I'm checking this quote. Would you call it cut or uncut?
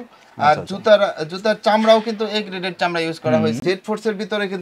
cut